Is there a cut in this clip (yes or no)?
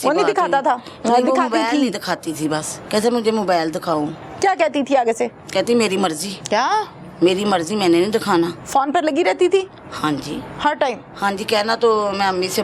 yes